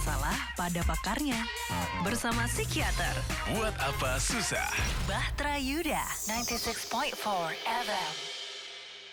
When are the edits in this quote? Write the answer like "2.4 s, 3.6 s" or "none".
none

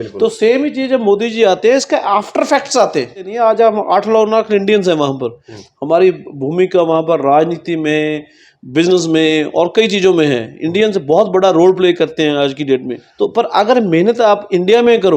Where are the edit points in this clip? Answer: 3.3 s, 13.0 s

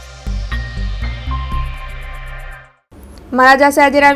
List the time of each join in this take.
none

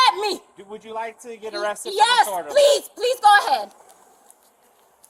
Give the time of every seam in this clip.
none

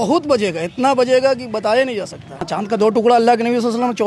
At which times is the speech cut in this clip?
2.5 s

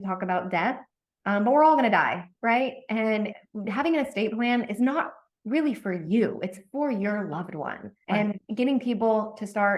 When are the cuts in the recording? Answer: 3.5 s

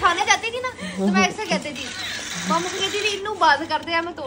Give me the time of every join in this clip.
none

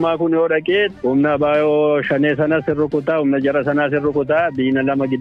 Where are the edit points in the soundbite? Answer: 1.0 s

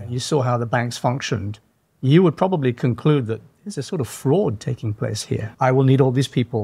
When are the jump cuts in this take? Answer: 5.5 s

